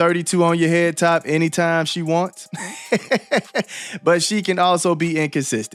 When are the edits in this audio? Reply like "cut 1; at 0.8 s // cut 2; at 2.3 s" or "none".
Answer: none